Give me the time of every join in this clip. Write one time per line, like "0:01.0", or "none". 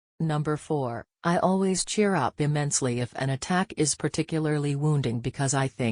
0:00.9